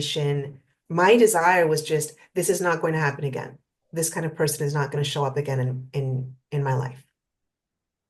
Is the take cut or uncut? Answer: uncut